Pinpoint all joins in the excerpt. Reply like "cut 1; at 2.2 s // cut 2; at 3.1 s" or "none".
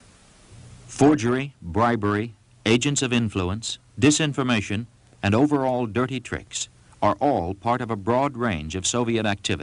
cut 1; at 1.7 s